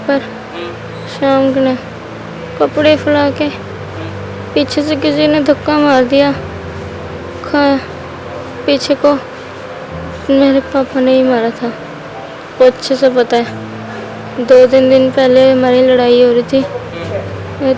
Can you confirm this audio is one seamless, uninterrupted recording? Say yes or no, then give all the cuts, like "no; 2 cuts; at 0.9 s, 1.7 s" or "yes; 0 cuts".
yes; 0 cuts